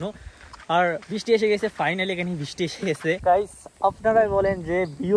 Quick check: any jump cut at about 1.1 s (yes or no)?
no